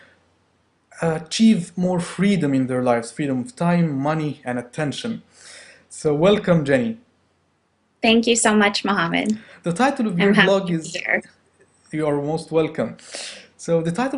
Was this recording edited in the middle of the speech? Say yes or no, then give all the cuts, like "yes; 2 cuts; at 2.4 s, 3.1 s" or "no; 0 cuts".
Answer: yes; 1 cut; at 1.3 s